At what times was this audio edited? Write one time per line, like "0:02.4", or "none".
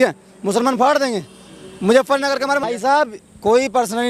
0:02.6